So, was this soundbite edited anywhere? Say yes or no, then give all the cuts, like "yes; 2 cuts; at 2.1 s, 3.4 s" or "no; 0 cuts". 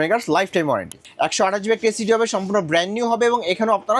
yes; 1 cut; at 1.0 s